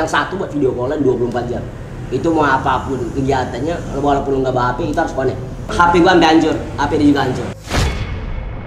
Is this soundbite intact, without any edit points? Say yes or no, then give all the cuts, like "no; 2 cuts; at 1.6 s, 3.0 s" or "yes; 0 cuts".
no; 2 cuts; at 1.7 s, 5.7 s